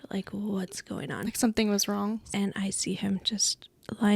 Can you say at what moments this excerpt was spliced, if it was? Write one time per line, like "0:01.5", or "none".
0:02.3